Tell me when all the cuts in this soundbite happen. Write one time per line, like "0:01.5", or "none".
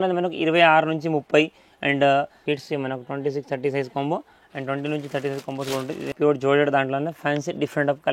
0:02.4
0:06.1

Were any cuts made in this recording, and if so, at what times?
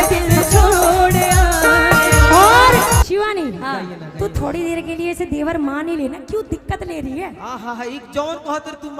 0:03.0

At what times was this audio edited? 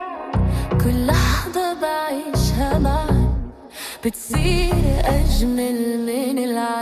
none

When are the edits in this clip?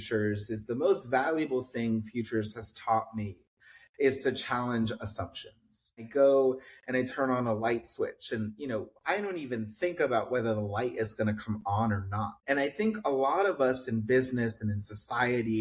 0:06.1
0:12.4

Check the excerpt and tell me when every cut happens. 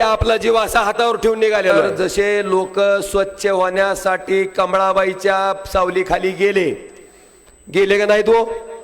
0:01.8

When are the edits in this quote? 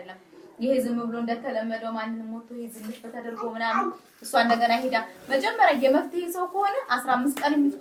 none

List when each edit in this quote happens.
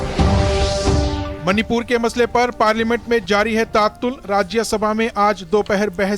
0:00.9

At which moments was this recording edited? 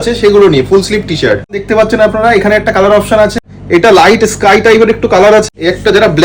0:01.6
0:03.5
0:05.4

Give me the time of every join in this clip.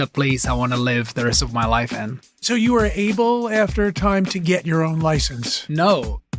0:02.3

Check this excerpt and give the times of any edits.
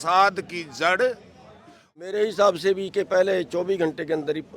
0:02.0

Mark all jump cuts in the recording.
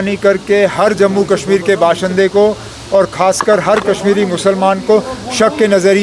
none

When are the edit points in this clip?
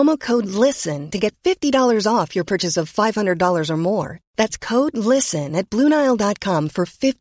none

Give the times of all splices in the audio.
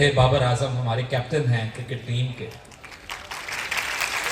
none

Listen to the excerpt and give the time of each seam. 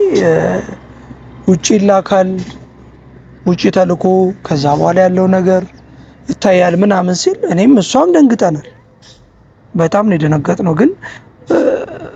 none

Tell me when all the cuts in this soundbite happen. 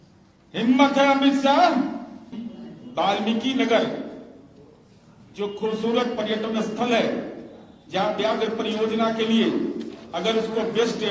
0:02.4

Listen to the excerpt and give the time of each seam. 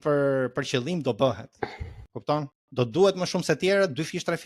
none

